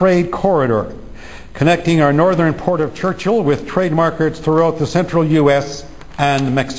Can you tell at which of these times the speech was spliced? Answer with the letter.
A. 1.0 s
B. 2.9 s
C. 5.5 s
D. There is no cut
A